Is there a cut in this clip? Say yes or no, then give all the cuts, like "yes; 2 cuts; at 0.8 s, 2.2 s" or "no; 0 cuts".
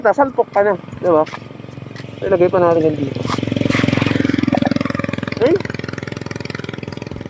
no; 0 cuts